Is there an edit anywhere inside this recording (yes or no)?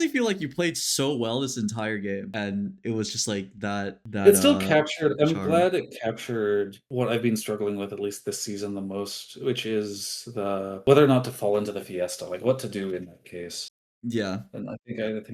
yes